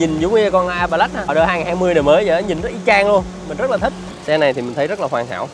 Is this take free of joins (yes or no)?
no